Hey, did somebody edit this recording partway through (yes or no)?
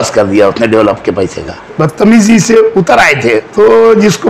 yes